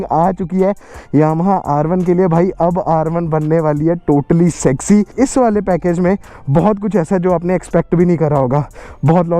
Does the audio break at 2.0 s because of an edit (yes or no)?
no